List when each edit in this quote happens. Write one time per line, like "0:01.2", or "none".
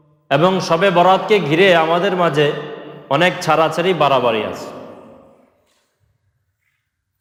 none